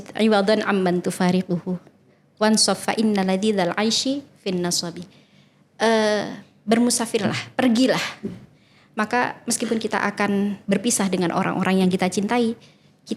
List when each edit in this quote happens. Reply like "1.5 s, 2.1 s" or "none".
none